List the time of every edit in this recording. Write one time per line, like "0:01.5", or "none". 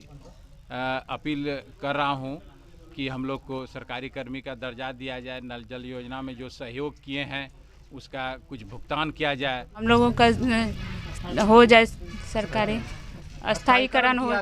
0:09.8